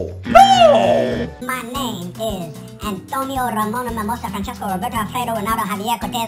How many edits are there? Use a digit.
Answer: 1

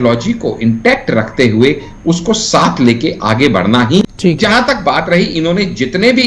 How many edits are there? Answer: 1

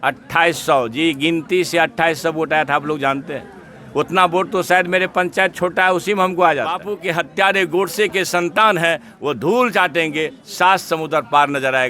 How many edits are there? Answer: 1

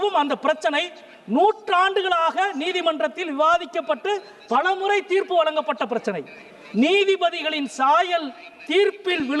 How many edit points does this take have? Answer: 0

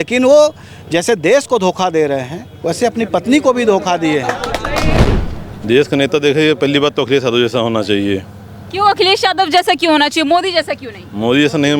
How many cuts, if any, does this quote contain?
1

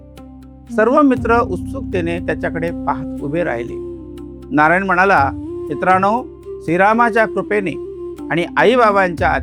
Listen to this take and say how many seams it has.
0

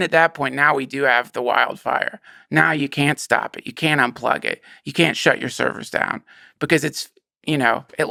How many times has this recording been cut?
0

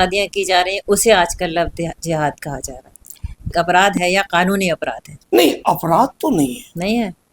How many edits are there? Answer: 1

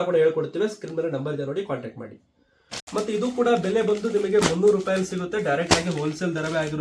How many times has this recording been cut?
1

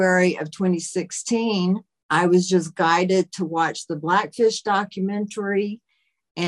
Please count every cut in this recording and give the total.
1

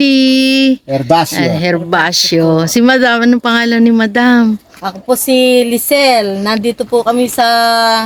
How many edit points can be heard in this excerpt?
0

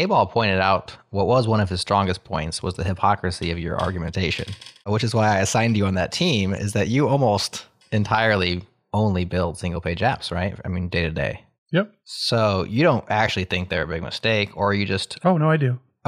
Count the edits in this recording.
0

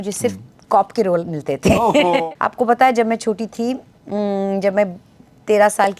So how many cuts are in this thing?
1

